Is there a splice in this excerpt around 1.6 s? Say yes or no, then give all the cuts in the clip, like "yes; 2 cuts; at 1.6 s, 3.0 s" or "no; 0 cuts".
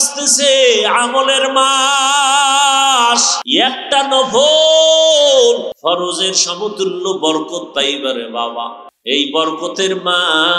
no; 3 cuts; at 3.4 s, 5.7 s, 8.9 s